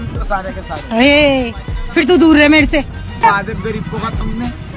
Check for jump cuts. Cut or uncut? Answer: cut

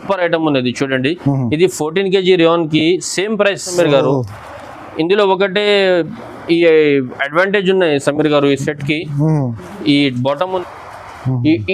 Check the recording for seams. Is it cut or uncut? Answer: cut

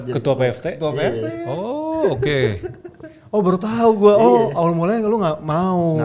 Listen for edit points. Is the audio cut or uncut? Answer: uncut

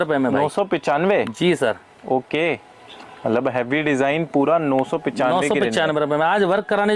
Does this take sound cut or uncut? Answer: uncut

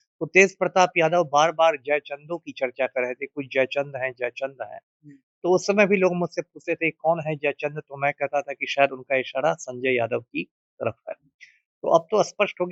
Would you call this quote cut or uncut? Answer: uncut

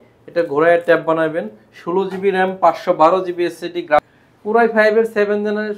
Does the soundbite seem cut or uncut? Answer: cut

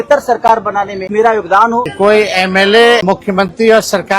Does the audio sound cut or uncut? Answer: cut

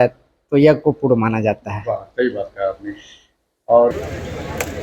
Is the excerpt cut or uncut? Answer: cut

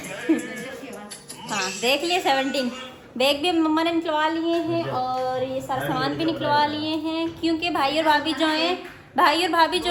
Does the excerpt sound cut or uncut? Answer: uncut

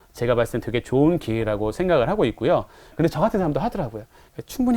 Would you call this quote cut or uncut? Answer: cut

